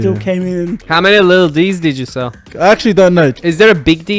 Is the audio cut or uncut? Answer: cut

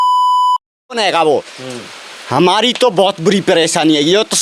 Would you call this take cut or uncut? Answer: cut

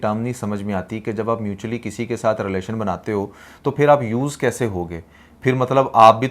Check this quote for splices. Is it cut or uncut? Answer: uncut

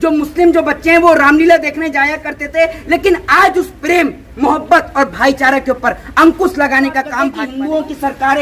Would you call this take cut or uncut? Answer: cut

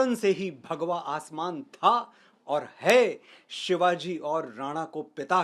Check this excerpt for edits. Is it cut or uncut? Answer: uncut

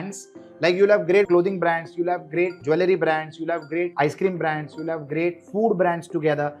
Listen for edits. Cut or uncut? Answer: cut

